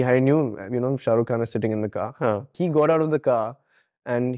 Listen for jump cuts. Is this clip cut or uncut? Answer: cut